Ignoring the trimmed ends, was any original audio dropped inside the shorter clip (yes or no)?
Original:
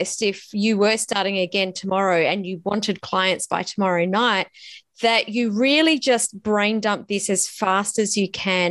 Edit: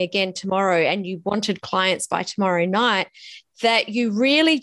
no